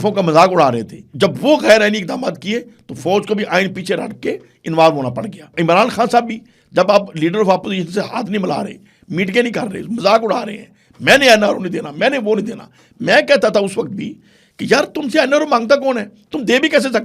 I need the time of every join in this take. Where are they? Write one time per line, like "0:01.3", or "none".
0:01.0
0:05.5